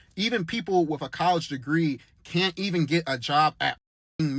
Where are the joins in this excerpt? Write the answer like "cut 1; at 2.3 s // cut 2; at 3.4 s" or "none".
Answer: none